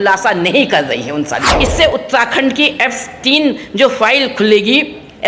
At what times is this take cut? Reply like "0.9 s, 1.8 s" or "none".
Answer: 1.5 s